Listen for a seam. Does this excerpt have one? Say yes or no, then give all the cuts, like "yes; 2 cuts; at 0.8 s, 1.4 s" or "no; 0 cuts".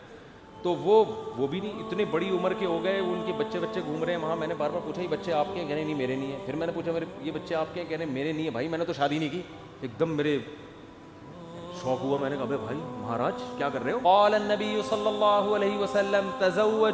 yes; 1 cut; at 14.0 s